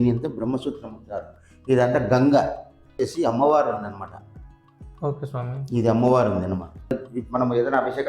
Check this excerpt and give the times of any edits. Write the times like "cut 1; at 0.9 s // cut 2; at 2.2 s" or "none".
cut 1; at 2.9 s // cut 2; at 7.0 s